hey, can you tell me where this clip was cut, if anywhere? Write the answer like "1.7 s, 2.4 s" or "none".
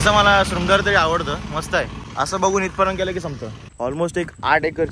3.7 s